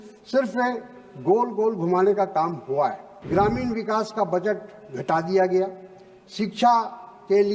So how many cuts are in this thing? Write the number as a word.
one